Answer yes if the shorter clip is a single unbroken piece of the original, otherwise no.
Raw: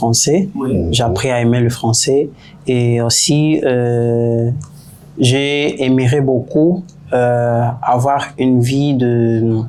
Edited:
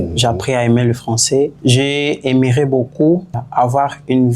no